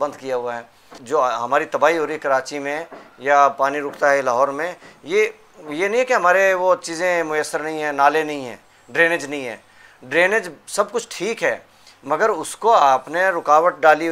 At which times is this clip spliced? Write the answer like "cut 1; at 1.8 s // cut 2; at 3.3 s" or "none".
cut 1; at 0.9 s